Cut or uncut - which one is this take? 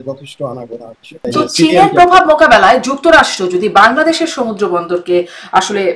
cut